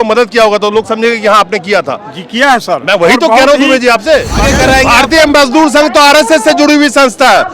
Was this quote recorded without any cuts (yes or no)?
no